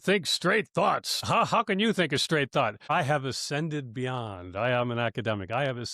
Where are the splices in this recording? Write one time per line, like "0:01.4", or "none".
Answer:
0:01.2
0:02.8